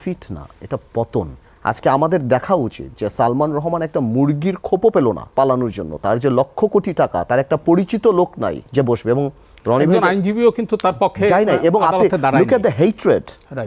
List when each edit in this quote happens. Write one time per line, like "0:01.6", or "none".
0:01.4
0:05.2
0:08.6

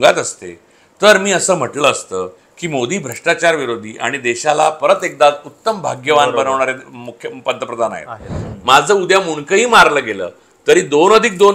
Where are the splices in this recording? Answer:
0:08.3

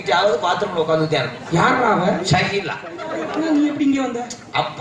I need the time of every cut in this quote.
0:03.3

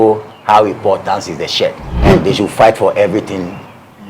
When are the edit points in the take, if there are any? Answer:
0:01.9

